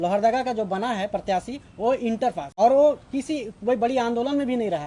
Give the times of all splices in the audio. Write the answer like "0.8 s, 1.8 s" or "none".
2.5 s